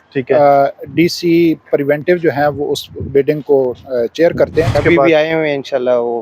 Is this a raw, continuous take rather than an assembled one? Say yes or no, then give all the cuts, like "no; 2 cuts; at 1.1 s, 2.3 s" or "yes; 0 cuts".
no; 1 cut; at 4.8 s